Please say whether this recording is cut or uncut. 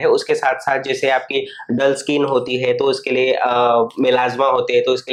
uncut